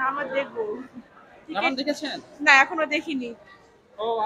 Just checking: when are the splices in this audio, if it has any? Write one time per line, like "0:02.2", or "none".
none